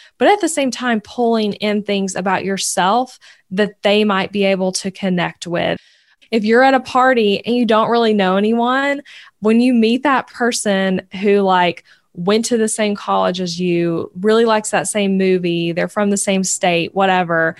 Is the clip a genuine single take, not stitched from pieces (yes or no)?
no